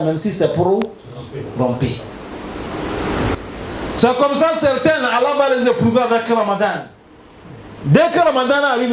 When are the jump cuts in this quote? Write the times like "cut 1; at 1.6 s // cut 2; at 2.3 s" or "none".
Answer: cut 1; at 3.3 s